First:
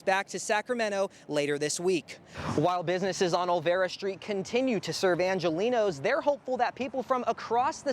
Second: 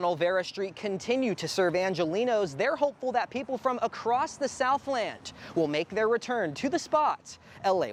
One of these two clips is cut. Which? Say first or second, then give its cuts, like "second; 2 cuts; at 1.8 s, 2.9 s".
first; 1 cut; at 2.3 s